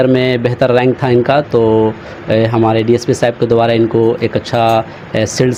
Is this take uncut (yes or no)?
yes